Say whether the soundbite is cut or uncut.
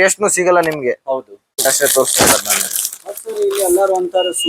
cut